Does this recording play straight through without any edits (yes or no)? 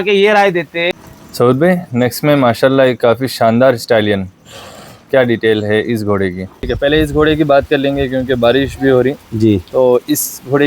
no